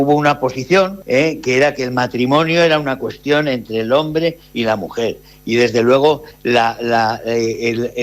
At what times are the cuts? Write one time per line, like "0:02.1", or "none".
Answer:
0:01.0